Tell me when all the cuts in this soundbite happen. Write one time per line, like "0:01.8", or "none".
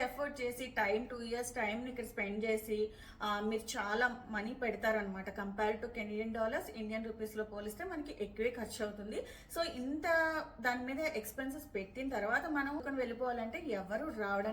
0:12.8